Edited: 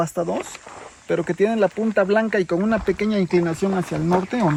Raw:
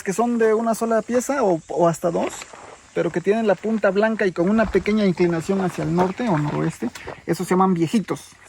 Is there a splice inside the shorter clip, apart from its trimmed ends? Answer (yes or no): no